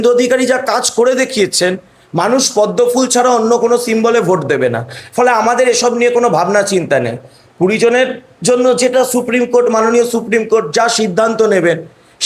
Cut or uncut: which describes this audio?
uncut